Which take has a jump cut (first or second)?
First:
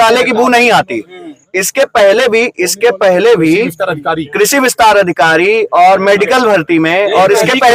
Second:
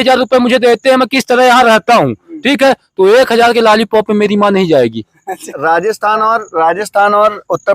second